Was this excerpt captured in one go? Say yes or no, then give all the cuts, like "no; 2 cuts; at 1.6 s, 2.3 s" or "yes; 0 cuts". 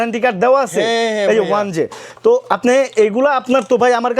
yes; 0 cuts